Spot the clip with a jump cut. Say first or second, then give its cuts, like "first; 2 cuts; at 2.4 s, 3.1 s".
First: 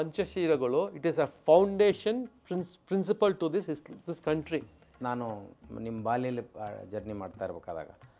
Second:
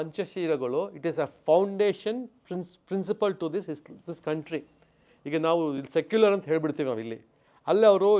first; 1 cut; at 5.0 s